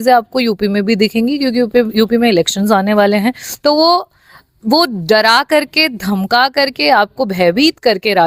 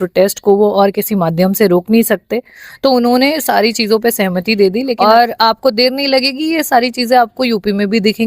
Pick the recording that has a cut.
second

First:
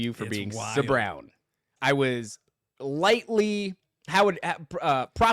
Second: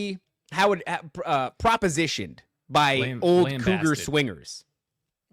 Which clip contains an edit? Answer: first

